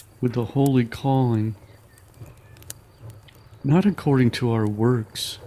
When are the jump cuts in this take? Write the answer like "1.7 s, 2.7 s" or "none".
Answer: 1.6 s, 3.6 s